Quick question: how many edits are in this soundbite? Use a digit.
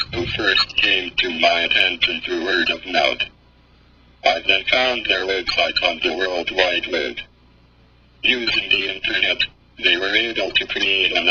0